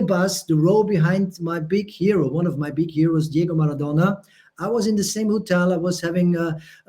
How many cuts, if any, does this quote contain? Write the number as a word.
zero